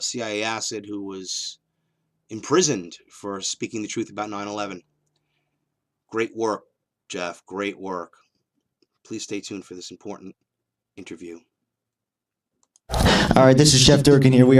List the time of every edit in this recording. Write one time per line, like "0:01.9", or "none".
0:03.8